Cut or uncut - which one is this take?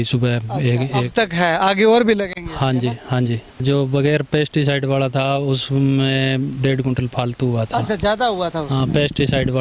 cut